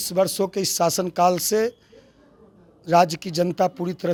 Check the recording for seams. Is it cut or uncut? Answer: uncut